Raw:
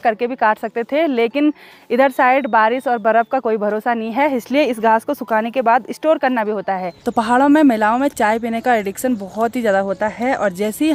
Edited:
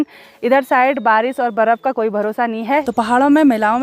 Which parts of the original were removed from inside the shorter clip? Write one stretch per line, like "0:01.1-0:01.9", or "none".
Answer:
0:04.3-0:07.0